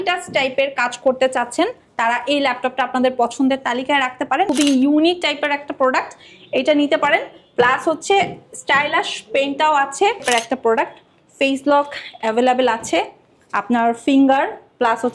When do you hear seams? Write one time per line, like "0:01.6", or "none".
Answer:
0:04.5
0:10.2